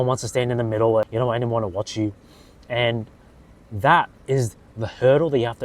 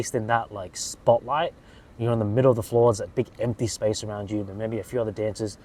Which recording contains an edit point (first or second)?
first